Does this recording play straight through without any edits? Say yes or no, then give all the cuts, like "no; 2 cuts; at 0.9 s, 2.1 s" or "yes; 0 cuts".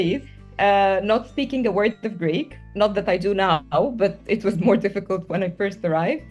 yes; 0 cuts